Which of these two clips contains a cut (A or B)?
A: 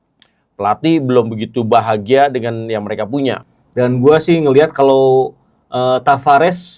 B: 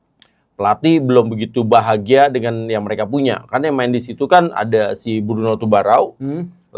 A